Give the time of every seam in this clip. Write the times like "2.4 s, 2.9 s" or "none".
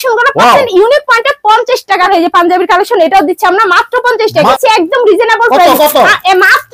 2.1 s, 4.5 s